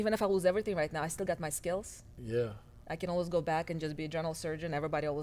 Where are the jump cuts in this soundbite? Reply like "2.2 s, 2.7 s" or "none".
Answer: none